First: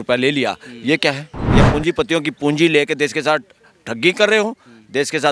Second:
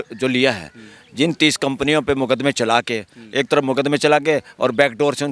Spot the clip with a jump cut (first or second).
first